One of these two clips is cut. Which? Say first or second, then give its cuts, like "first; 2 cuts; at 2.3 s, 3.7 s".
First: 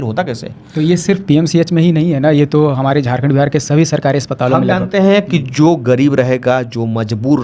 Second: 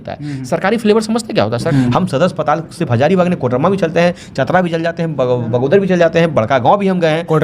second; 1 cut; at 1.7 s